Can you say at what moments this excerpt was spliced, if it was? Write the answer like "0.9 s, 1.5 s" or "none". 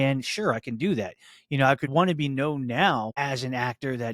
1.9 s, 3.1 s